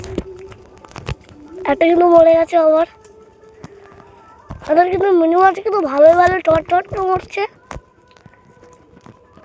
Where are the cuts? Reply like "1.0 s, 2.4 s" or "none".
none